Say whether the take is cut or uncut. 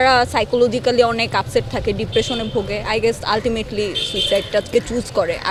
uncut